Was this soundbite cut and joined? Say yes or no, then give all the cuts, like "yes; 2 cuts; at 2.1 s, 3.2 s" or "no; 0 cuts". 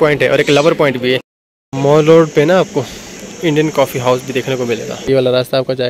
yes; 2 cuts; at 1.0 s, 5.1 s